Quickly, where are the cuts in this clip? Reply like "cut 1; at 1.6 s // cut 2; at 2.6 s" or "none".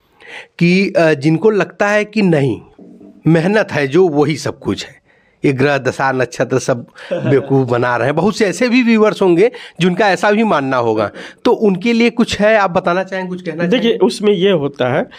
none